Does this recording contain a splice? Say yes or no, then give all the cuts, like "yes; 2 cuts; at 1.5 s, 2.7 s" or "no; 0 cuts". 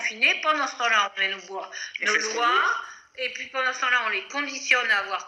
no; 0 cuts